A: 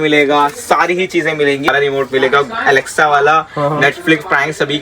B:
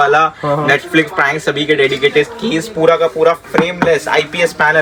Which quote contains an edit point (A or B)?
A